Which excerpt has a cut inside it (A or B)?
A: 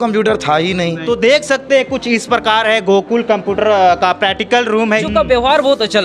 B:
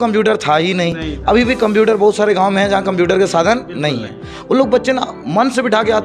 A